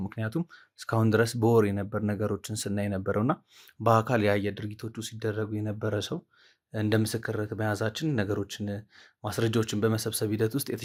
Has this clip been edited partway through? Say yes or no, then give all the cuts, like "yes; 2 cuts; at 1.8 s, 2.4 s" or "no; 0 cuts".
no; 0 cuts